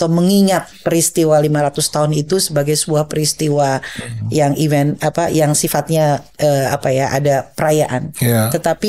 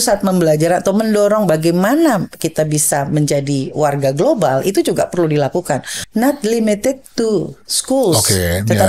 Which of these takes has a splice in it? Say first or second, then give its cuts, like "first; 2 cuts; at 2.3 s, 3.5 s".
second; 1 cut; at 6.0 s